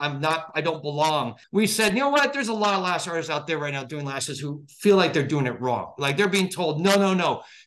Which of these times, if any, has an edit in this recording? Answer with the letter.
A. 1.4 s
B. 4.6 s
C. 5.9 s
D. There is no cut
A